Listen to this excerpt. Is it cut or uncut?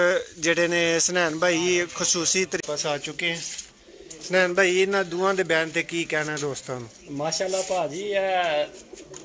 cut